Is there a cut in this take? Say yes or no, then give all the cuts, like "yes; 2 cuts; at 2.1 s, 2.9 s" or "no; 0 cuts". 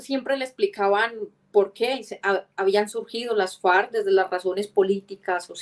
no; 0 cuts